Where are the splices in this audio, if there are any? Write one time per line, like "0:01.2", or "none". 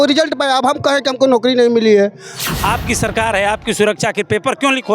0:02.4